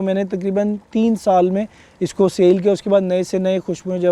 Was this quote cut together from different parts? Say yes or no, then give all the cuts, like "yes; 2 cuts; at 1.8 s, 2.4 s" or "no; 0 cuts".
no; 0 cuts